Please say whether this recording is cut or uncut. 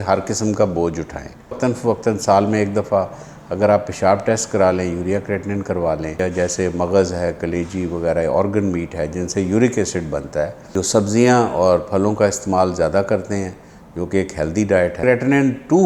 cut